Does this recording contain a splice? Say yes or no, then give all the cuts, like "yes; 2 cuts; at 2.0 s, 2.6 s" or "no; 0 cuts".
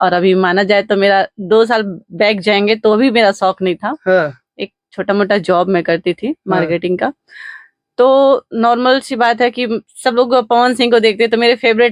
no; 0 cuts